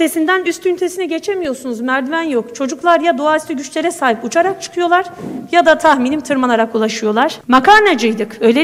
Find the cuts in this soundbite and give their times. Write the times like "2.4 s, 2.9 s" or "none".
7.4 s